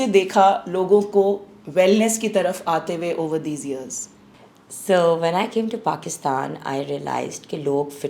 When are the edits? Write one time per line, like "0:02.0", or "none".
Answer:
none